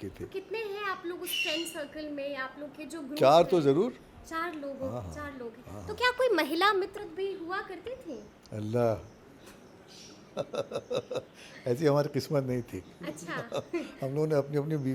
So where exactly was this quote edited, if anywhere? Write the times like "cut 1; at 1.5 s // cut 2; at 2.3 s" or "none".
none